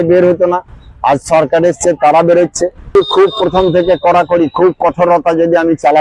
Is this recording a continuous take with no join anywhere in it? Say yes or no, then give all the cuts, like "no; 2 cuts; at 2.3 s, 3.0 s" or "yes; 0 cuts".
no; 1 cut; at 2.9 s